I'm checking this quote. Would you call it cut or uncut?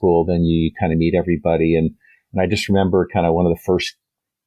uncut